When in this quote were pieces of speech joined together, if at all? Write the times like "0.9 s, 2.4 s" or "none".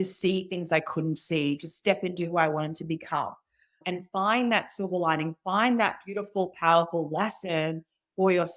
none

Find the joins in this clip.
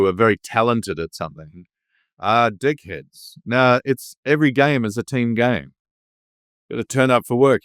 none

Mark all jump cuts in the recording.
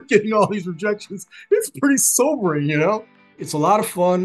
3.3 s

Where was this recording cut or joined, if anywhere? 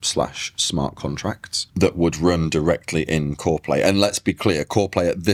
none

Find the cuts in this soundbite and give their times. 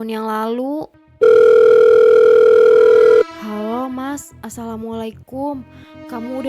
0.9 s

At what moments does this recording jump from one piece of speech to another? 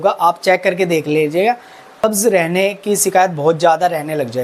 2.0 s

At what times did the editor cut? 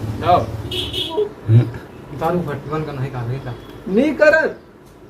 1.0 s

